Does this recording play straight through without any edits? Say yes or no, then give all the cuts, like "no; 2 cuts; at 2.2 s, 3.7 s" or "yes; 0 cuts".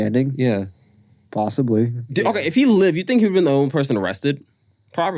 no; 1 cut; at 2.1 s